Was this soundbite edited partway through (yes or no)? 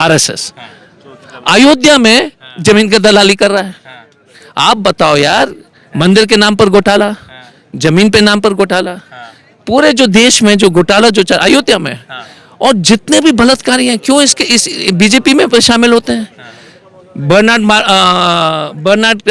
no